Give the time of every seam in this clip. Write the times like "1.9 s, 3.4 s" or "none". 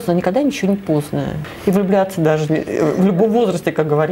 1.4 s